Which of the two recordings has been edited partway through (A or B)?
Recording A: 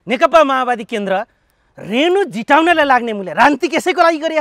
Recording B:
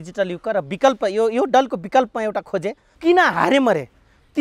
B